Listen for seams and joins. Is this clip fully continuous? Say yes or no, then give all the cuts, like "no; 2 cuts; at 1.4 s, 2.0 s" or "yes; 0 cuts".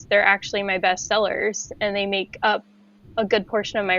yes; 0 cuts